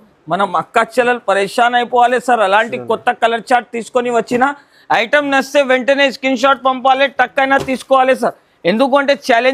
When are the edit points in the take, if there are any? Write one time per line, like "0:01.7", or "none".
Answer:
none